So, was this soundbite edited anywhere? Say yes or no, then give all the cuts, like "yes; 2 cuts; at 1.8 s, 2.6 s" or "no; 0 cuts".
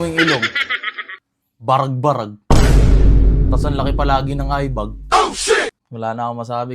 yes; 1 cut; at 5.8 s